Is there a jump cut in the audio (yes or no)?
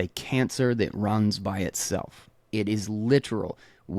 no